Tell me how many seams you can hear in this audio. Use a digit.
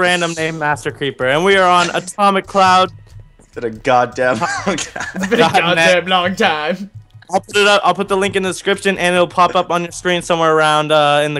0